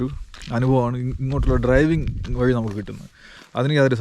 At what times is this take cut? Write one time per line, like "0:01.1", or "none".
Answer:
none